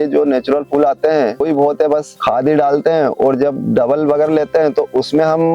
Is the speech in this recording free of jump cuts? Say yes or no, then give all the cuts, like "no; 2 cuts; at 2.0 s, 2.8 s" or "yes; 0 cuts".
yes; 0 cuts